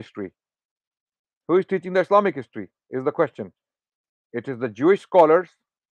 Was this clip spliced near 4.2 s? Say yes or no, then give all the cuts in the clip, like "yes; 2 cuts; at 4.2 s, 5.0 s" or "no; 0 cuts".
no; 0 cuts